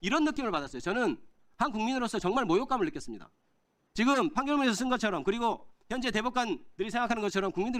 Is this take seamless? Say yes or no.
yes